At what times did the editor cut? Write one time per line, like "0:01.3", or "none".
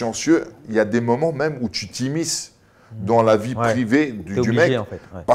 none